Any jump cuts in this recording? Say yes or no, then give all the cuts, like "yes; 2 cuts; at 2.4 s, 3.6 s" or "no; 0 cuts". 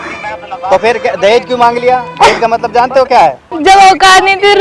yes; 1 cut; at 3.5 s